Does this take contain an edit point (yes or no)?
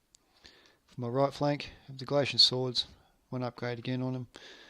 yes